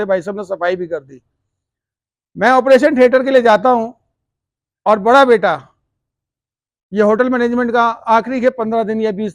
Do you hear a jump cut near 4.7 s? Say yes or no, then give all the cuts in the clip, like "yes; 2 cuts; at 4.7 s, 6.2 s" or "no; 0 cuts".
no; 0 cuts